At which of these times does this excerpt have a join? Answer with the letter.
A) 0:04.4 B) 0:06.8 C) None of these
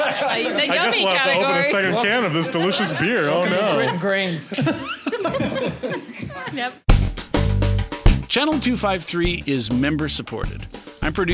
B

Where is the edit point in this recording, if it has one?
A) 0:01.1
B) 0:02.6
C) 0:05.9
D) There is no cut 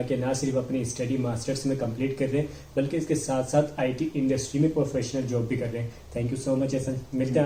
D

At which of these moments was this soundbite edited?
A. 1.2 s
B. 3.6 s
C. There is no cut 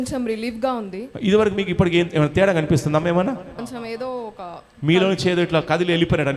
B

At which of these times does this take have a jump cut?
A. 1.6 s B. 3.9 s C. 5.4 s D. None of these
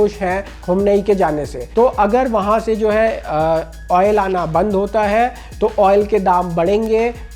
A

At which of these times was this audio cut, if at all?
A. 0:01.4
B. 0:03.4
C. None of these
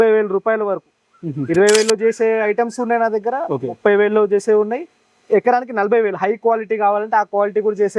C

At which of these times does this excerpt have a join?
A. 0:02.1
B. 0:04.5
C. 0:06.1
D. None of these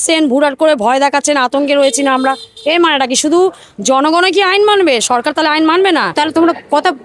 C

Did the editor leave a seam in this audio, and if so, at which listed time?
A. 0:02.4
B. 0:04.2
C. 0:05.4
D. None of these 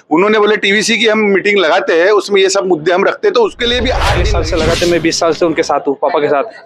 B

